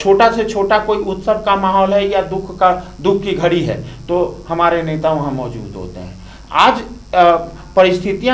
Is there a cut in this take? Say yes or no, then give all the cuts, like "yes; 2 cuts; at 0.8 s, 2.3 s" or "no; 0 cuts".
no; 0 cuts